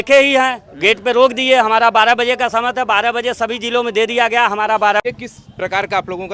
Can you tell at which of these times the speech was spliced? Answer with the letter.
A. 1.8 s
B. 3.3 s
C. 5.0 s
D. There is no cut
C